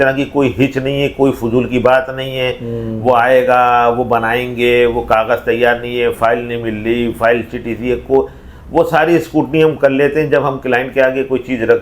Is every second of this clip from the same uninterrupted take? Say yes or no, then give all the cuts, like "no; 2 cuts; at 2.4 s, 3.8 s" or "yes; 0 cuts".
yes; 0 cuts